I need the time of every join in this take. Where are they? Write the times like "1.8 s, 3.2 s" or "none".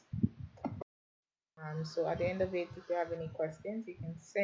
0.9 s